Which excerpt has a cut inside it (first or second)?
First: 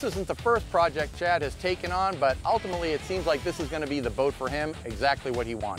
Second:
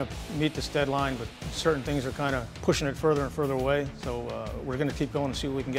second